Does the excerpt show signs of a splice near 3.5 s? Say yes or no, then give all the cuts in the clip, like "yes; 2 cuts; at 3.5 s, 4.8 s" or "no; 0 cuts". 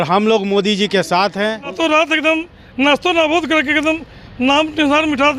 no; 1 cut; at 1.7 s